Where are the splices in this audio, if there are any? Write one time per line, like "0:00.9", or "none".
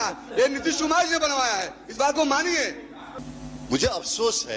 0:03.1